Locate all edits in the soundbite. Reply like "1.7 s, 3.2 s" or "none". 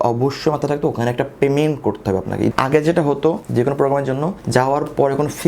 2.5 s, 3.4 s, 4.4 s